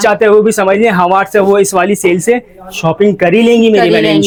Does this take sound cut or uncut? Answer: uncut